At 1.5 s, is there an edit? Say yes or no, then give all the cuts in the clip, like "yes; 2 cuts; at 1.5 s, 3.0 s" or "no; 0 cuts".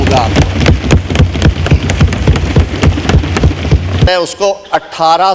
no; 1 cut; at 4.1 s